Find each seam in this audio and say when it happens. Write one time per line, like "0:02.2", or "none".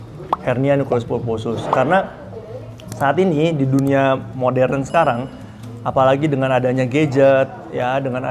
none